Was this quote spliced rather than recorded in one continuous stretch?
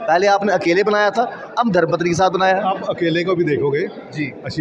no; 0 cuts

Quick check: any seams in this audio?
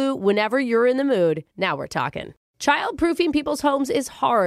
yes; 1 cut; at 2.5 s

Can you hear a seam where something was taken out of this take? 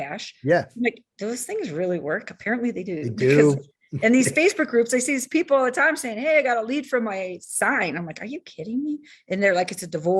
no; 0 cuts

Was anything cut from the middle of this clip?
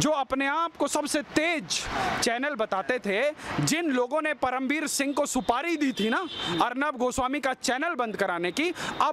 no; 0 cuts

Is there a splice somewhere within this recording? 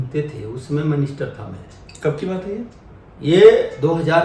no; 0 cuts

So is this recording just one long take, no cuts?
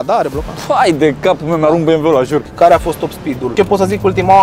no; 2 cuts; at 2.5 s, 3.3 s

